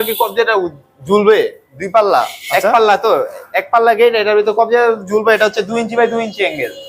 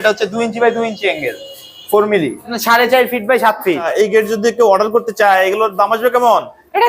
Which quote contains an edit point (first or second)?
second